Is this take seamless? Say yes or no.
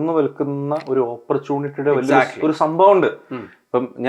yes